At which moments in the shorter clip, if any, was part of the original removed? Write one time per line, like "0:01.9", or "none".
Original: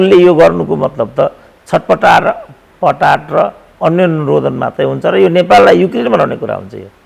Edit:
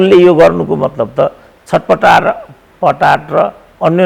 none